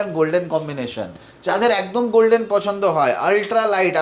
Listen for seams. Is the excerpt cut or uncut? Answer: uncut